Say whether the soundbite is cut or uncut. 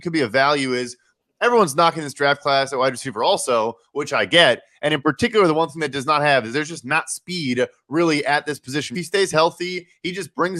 cut